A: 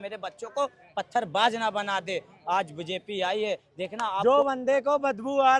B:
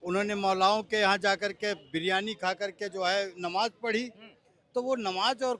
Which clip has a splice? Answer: A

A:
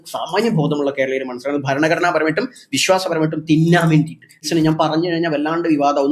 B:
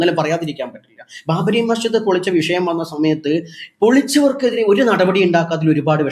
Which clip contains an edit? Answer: A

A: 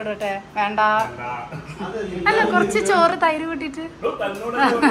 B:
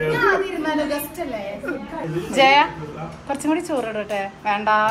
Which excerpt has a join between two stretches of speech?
B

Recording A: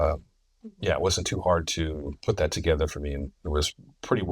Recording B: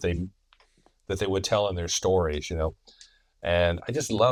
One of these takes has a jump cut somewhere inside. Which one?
A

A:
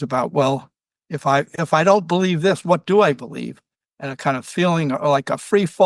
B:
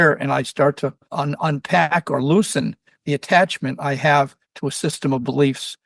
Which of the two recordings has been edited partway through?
B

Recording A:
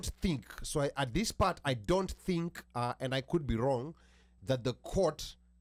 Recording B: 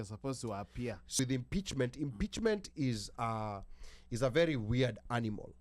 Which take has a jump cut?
B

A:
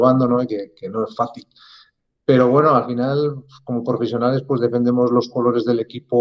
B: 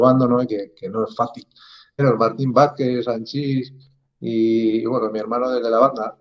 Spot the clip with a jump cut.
B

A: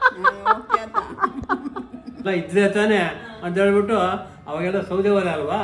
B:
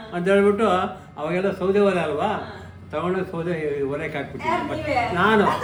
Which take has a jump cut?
A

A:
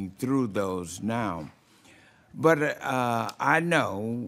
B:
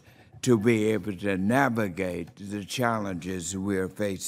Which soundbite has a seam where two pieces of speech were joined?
A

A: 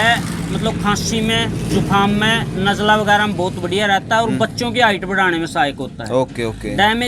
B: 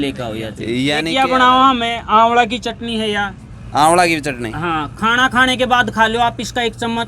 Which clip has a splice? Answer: B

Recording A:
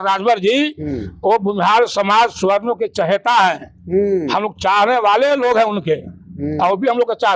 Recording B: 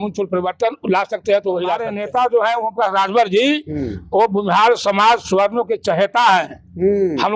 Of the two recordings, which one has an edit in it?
B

